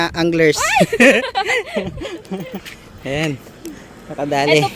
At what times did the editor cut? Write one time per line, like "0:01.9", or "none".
none